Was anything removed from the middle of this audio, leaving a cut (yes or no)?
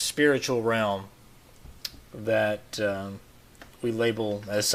no